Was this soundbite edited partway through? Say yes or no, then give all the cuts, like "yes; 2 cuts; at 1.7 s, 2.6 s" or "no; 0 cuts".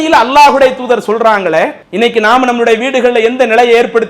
yes; 1 cut; at 1.8 s